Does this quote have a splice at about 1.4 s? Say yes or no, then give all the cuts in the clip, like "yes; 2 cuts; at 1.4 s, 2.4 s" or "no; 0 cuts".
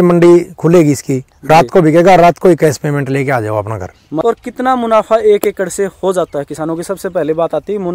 no; 1 cut; at 4.2 s